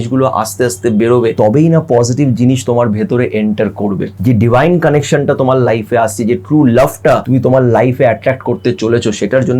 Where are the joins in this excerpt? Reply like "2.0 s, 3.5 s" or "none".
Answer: 1.3 s, 4.1 s, 7.2 s

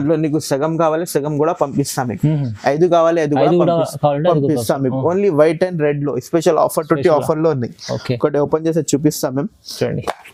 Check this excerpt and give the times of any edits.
none

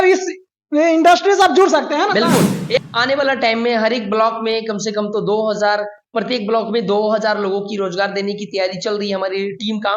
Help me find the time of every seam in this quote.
2.8 s

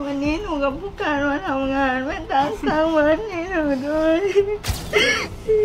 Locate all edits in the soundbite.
4.7 s

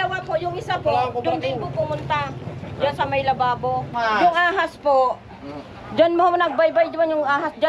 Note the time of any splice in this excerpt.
3.9 s

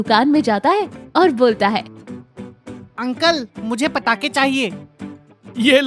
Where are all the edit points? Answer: none

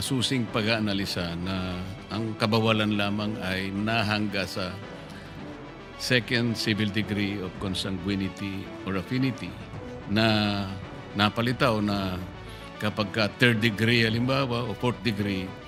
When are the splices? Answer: none

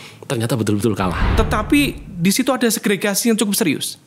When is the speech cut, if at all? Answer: 1.2 s

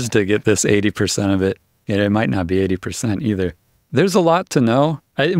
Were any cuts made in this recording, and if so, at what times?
none

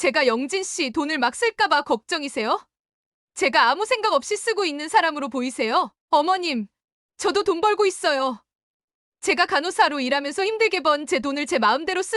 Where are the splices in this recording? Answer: 6.0 s

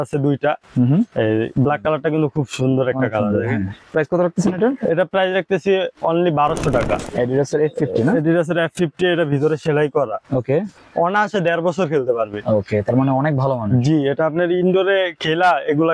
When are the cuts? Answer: 3.8 s, 6.9 s, 10.8 s

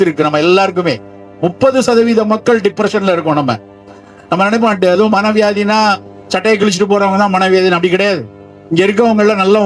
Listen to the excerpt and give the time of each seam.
none

